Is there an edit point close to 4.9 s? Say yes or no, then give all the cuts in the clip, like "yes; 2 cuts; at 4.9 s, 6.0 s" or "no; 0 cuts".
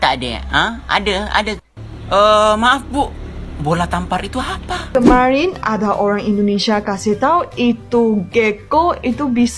yes; 1 cut; at 4.9 s